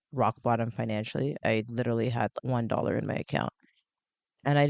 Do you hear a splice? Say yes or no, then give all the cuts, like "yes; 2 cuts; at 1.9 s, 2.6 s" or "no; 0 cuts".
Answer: yes; 2 cuts; at 1.4 s, 2.4 s